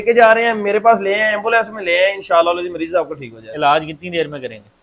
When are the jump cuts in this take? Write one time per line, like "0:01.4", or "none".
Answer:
none

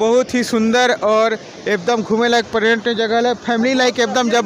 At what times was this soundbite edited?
none

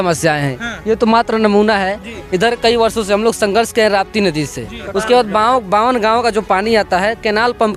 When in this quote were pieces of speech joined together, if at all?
none

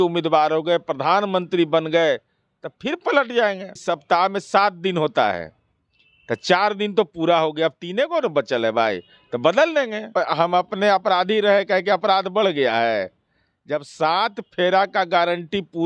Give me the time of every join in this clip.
0:03.8
0:10.1

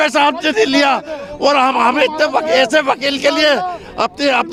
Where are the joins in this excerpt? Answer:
none

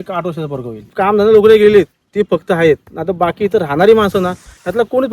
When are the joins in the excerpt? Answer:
0:00.9

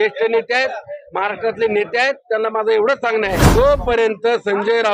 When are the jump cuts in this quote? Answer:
0:03.5

